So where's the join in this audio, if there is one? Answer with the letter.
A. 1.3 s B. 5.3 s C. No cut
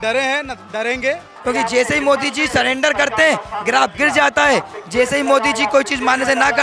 A